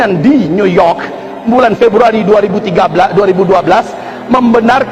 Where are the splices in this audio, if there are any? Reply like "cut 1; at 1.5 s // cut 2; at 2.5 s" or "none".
none